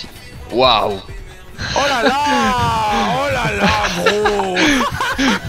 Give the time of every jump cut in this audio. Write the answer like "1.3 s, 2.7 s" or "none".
none